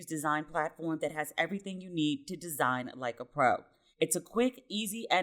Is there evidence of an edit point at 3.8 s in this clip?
yes; 1 cut; at 3.8 s

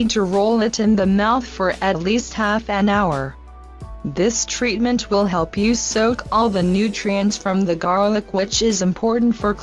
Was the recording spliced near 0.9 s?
no; 1 cut; at 8.1 s

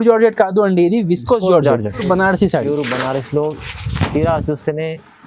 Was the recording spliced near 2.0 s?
yes; 1 cut; at 2.0 s

